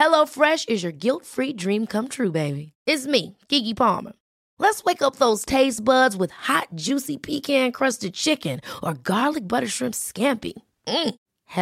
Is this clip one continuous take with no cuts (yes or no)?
yes